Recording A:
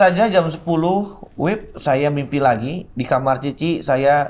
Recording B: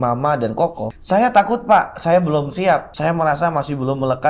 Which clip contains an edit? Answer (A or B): B